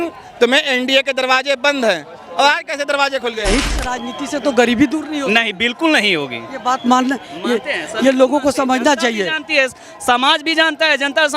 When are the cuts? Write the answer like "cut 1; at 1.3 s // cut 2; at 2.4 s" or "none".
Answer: cut 1; at 3.6 s